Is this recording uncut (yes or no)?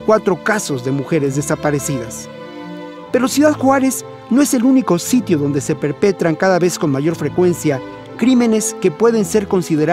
yes